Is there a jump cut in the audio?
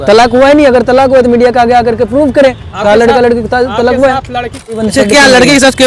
yes; 1 cut; at 4.8 s

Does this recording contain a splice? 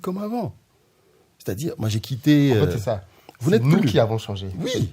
no; 0 cuts

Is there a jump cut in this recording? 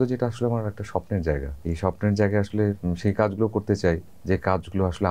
yes; 2 cuts; at 1.5 s, 4.1 s

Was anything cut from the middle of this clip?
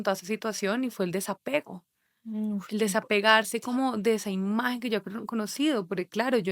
no; 0 cuts

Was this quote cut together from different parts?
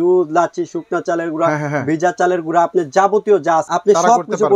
yes; 1 cut; at 3.7 s

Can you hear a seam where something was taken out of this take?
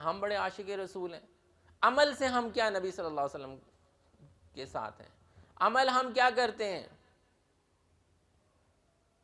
no; 0 cuts

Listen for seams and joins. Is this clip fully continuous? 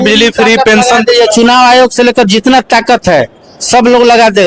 yes; 0 cuts

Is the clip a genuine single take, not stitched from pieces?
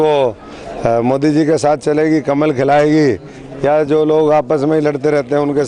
yes; 0 cuts

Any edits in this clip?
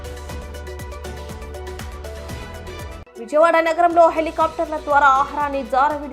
yes; 1 cut; at 2.9 s

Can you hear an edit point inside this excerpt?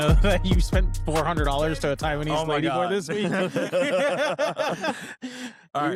no; 0 cuts

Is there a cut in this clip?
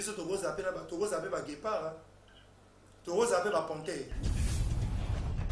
yes; 1 cut; at 4.1 s

